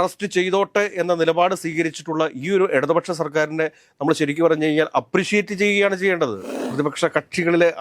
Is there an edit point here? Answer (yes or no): yes